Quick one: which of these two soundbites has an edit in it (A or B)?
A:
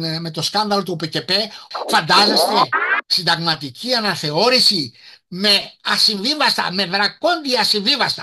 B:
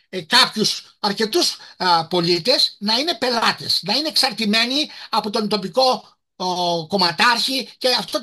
A